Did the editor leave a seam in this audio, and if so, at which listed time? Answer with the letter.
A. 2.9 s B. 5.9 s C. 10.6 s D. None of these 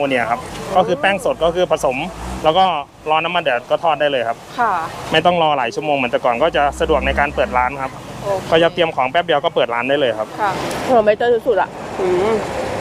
C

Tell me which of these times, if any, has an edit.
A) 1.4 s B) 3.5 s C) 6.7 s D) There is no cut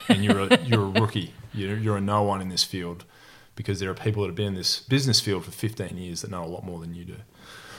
D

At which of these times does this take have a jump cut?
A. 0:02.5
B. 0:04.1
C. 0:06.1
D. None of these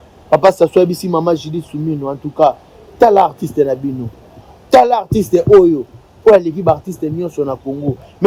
D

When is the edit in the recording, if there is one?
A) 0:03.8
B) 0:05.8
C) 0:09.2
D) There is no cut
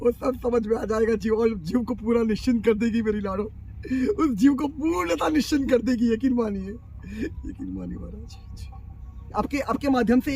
C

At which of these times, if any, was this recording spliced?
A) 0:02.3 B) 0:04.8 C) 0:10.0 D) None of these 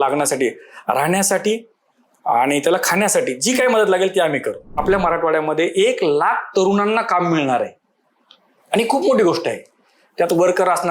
B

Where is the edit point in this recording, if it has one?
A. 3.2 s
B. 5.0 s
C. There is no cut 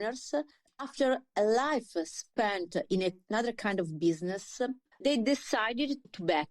B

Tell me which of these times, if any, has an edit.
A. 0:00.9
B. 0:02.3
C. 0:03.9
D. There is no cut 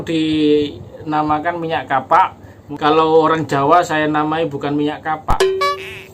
B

